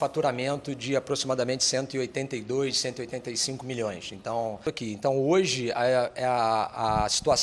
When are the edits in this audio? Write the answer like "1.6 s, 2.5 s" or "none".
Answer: 4.7 s